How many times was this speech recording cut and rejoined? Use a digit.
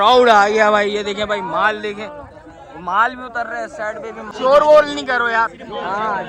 1